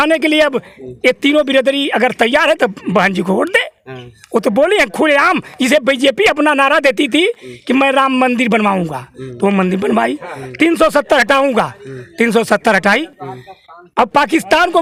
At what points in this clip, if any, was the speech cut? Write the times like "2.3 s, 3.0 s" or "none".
none